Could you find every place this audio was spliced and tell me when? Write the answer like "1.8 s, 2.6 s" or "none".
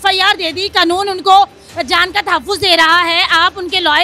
none